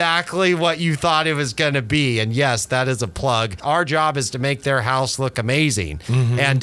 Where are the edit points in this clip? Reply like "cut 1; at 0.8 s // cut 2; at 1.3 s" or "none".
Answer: cut 1; at 3.5 s